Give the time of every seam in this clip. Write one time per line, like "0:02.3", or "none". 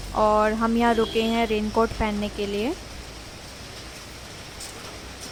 none